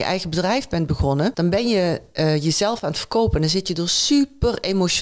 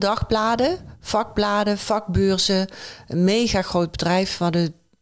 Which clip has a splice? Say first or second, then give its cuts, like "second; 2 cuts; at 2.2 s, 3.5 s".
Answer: first; 1 cut; at 1.4 s